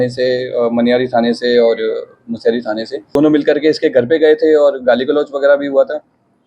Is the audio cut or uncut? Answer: cut